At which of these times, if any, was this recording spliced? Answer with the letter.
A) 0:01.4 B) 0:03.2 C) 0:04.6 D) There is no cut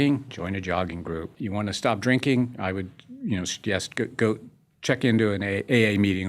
A